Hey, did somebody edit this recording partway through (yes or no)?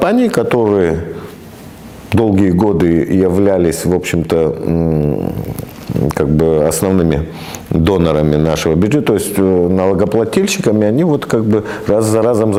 no